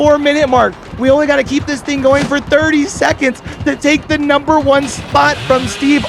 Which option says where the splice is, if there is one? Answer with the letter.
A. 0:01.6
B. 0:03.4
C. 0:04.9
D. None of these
D